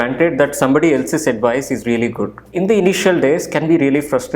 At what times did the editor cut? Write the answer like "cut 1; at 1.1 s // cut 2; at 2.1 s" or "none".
cut 1; at 2.5 s